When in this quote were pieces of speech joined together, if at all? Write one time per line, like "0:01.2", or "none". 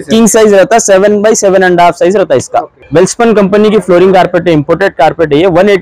0:02.8